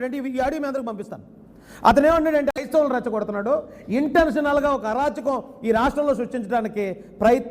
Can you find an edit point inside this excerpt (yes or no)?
yes